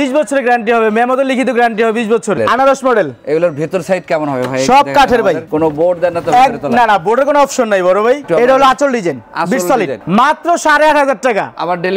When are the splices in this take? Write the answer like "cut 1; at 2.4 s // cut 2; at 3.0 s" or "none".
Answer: cut 1; at 2.4 s // cut 2; at 5.4 s // cut 3; at 8.2 s // cut 4; at 10.0 s